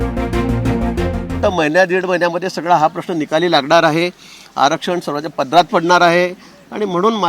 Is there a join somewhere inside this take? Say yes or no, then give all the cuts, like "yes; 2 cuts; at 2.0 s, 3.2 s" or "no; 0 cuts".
yes; 1 cut; at 1.4 s